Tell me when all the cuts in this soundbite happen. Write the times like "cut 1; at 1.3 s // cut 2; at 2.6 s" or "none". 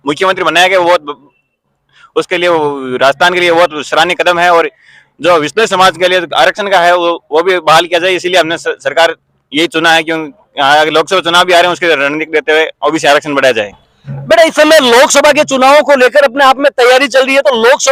none